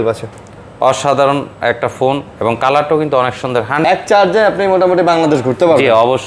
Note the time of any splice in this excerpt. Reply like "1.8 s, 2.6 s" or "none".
3.8 s